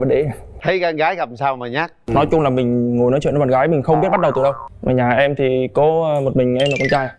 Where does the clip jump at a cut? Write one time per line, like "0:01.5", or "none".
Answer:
0:04.7